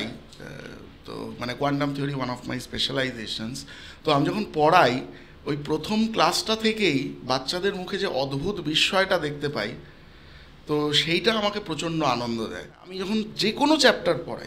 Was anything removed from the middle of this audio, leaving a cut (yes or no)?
yes